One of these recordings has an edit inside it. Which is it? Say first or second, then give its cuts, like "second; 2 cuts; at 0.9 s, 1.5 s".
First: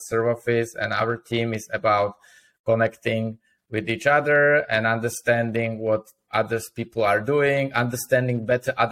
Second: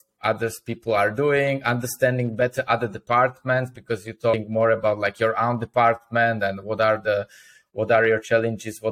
second; 1 cut; at 4.3 s